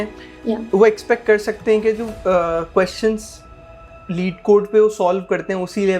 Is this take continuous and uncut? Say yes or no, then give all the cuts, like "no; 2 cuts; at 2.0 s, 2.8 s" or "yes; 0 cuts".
yes; 0 cuts